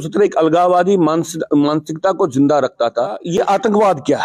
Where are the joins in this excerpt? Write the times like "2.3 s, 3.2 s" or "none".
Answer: 3.2 s